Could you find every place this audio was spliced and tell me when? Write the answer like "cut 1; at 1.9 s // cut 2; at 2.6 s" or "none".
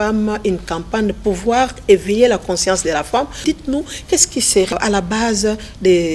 cut 1; at 1.2 s // cut 2; at 3.4 s // cut 3; at 4.7 s